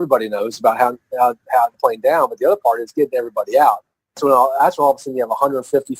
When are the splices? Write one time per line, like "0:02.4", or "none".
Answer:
0:01.7
0:04.2